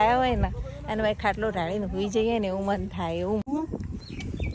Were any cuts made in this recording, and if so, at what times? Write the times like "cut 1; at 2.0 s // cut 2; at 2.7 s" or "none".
cut 1; at 3.4 s